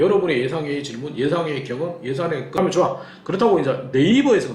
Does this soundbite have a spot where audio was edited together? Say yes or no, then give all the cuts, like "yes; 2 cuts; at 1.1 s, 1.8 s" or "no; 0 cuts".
yes; 1 cut; at 2.6 s